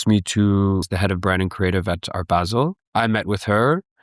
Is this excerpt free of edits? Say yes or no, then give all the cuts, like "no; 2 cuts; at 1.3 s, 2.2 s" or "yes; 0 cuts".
no; 2 cuts; at 0.9 s, 2.8 s